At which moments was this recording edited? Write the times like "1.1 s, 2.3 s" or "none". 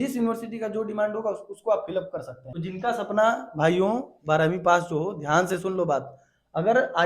2.4 s